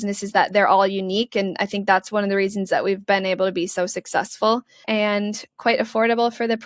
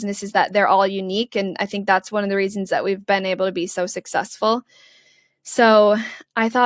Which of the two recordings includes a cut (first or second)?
first